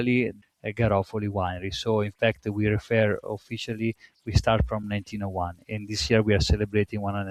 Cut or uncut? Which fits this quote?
uncut